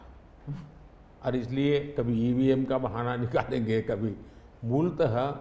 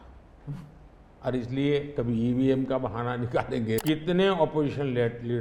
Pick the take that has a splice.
second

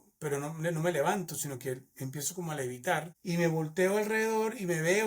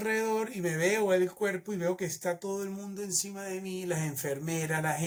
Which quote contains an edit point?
first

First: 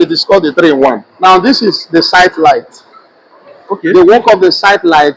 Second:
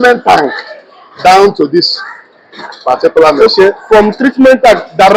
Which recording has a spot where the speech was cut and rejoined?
first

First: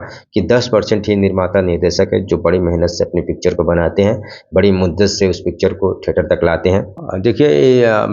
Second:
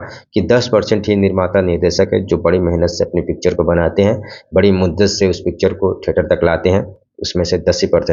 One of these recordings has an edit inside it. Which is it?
first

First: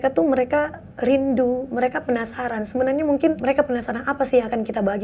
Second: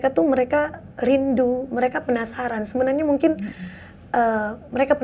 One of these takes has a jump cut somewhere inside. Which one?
first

